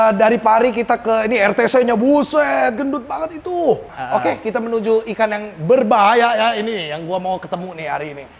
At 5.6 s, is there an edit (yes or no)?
no